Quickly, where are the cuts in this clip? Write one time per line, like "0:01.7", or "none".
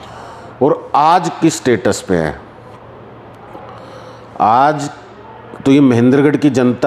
none